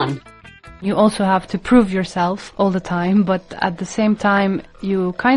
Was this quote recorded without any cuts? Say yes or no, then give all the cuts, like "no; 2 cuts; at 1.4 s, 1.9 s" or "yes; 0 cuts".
no; 2 cuts; at 0.8 s, 1.5 s